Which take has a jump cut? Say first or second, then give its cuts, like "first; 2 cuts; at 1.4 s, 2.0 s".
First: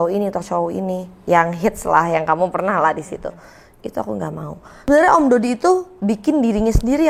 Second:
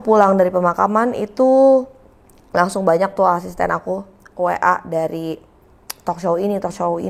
first; 1 cut; at 4.7 s